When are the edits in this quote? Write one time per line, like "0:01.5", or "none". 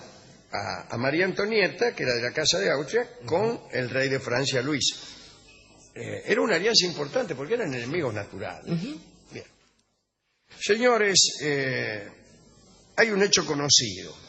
0:06.7

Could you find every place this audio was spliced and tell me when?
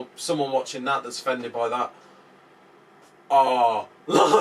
none

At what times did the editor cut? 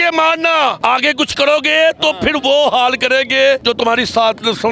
0:00.8
0:03.6

